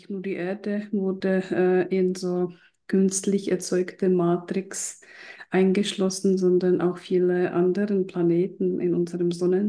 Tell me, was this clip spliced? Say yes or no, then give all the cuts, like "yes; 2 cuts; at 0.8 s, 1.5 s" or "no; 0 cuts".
no; 0 cuts